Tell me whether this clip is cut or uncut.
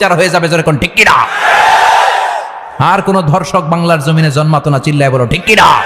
cut